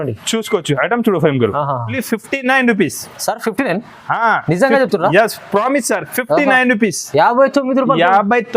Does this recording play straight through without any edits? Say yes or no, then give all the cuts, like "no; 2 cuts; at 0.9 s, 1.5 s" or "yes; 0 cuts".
no; 1 cut; at 2.0 s